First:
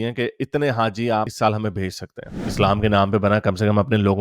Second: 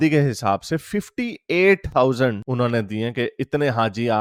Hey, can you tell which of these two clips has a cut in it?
first; 1 cut; at 2.4 s

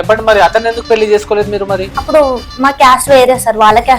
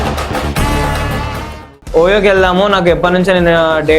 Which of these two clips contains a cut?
second; 1 cut; at 1.8 s

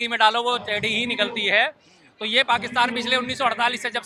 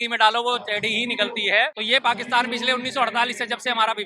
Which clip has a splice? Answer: second; 1 cut; at 1.8 s

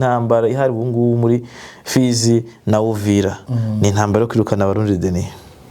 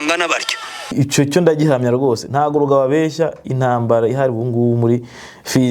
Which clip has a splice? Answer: second; 1 cut; at 0.9 s

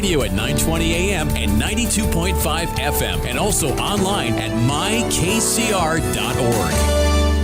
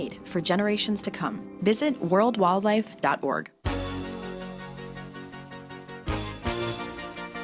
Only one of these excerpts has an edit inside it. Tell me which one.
second; 1 cut; at 3.5 s

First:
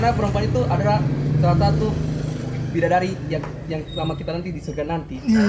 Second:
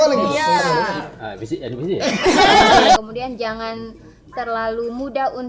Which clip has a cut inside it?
second; 1 cut; at 3.0 s

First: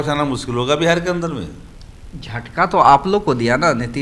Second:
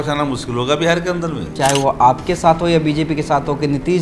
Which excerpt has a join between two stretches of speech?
second; 1 cut; at 1.5 s

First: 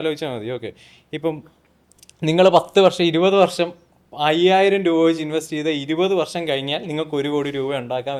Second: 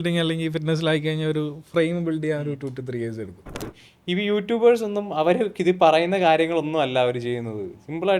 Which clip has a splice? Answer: second; 1 cut; at 3.7 s

